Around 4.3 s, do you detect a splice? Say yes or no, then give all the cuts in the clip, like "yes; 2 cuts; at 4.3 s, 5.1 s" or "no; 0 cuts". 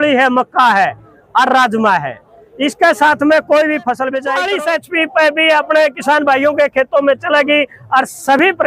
yes; 1 cut; at 4.3 s